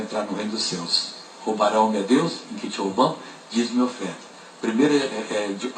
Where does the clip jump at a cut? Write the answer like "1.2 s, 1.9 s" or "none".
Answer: 1.0 s